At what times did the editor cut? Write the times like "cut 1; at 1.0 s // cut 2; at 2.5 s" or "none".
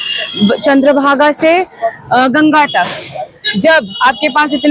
none

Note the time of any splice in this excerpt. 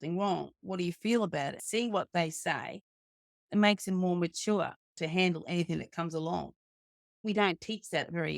cut 1; at 1.6 s // cut 2; at 3.3 s // cut 3; at 7.2 s

